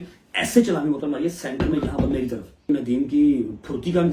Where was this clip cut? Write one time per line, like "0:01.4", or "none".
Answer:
0:02.6